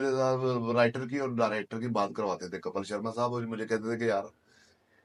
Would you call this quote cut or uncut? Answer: uncut